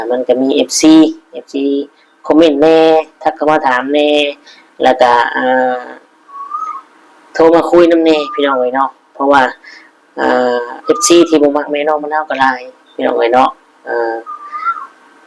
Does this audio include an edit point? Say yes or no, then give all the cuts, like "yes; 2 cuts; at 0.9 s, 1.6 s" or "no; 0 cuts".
no; 0 cuts